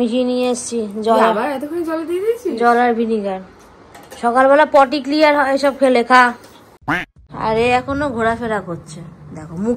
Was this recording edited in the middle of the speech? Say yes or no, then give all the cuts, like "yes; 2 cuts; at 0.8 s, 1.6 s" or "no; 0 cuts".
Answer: yes; 1 cut; at 7.0 s